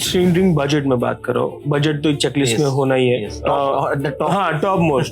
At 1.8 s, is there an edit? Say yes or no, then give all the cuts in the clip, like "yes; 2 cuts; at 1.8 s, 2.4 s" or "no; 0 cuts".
no; 1 cut; at 3.4 s